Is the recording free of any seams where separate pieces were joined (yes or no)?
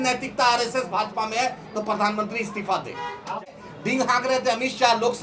no